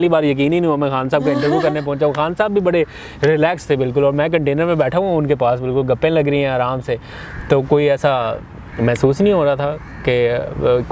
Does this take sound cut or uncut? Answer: uncut